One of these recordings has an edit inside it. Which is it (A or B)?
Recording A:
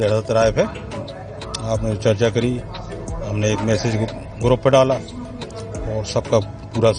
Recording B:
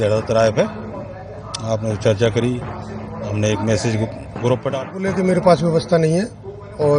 B